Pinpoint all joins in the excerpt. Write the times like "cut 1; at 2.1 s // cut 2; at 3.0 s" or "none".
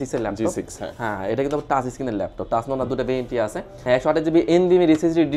cut 1; at 3.8 s